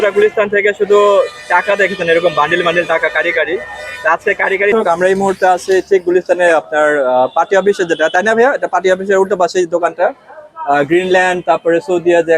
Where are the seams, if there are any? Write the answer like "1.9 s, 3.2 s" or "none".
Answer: 4.7 s